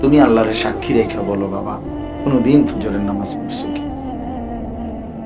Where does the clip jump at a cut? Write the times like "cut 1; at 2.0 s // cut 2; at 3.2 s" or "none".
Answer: cut 1; at 3.3 s